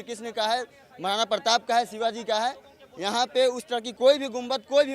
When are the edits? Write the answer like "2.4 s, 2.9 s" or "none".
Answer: 3.9 s